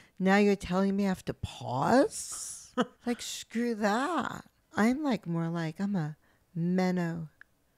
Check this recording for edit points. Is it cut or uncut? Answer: cut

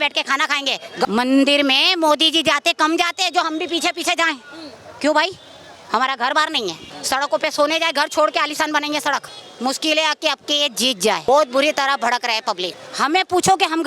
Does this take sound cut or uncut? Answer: cut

